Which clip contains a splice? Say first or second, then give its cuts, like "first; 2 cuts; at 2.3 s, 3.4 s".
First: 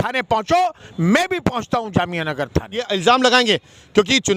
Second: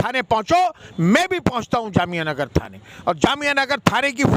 first; 1 cut; at 2.9 s